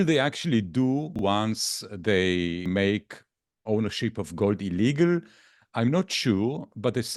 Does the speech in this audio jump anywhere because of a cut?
yes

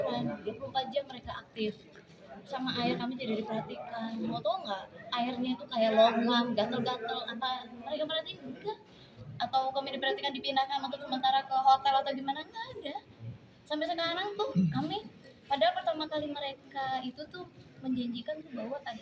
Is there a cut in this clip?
no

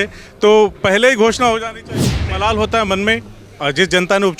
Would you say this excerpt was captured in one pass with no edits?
no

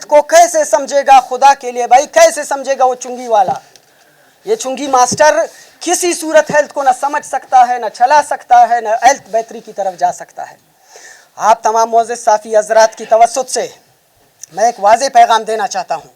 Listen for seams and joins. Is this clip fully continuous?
yes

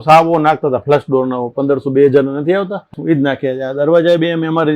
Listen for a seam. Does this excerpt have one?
yes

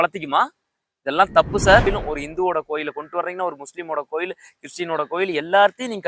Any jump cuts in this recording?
yes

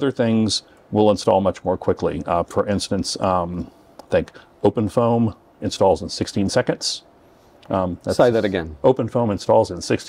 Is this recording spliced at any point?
no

